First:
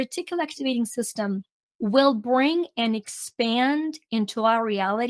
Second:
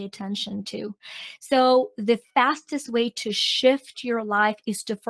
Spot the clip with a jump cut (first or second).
first